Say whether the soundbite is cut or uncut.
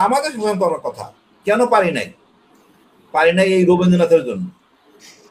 uncut